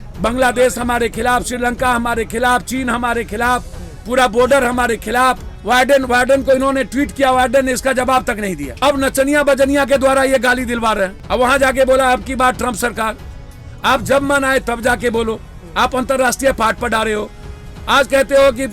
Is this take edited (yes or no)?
yes